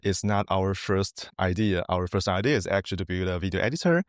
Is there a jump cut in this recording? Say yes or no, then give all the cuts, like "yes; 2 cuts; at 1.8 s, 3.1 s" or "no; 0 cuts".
yes; 1 cut; at 1.2 s